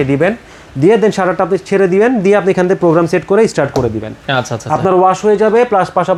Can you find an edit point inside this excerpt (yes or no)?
no